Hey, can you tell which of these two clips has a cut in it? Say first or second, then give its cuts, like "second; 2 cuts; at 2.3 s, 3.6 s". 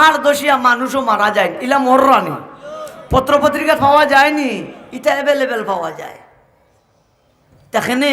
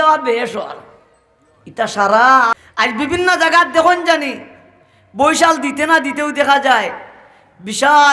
second; 1 cut; at 2.6 s